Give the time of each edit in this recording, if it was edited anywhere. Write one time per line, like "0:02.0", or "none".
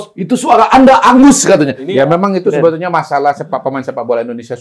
0:01.8